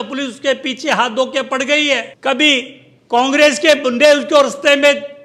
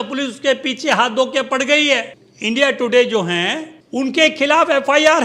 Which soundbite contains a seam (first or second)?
second